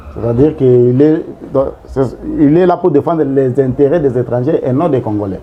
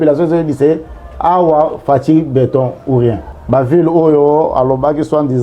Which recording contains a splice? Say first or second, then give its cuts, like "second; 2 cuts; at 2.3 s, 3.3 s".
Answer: second; 1 cut; at 3.3 s